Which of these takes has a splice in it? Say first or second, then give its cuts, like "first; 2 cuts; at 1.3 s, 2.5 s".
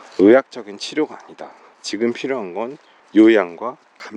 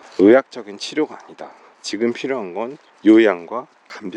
second; 1 cut; at 2.8 s